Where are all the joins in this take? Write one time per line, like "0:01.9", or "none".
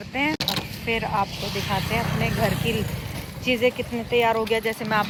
none